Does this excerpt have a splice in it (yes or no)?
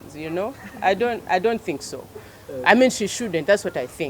no